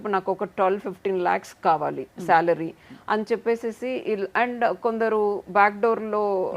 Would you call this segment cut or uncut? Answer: uncut